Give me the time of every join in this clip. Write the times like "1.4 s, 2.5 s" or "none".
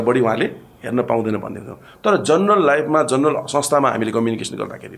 none